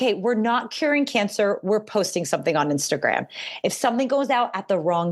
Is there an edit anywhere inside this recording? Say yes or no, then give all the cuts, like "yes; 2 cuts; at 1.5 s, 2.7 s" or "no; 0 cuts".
no; 0 cuts